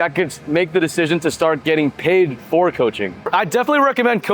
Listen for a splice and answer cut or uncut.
uncut